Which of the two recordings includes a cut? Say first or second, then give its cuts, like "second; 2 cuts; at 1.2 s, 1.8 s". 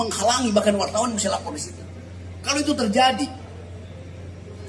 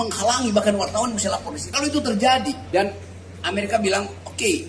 second; 2 cuts; at 1.6 s, 2.6 s